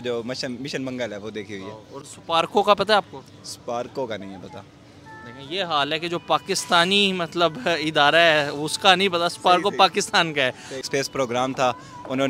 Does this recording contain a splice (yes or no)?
yes